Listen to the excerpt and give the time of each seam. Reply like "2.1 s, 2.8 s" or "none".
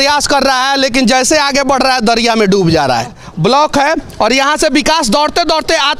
3.2 s